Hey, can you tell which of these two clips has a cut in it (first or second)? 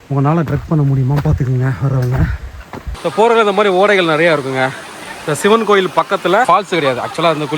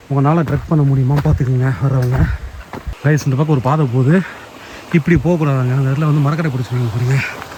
first